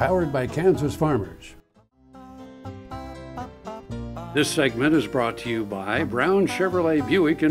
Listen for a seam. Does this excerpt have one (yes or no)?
yes